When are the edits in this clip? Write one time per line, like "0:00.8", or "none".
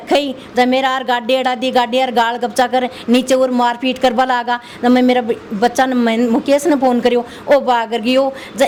none